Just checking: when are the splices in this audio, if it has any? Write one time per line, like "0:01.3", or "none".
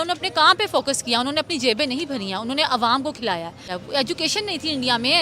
0:03.7